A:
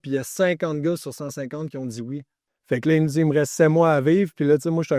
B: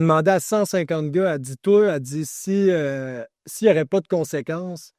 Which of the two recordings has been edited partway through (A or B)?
A